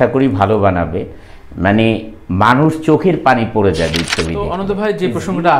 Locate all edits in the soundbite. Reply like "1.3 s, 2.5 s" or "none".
4.4 s